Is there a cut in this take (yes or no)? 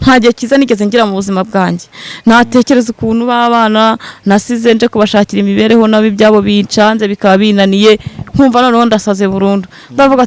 no